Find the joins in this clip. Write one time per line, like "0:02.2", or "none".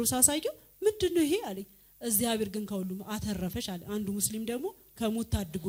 none